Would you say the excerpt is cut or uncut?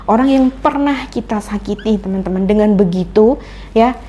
uncut